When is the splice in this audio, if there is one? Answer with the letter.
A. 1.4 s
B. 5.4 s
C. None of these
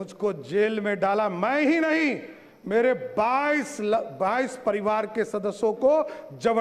C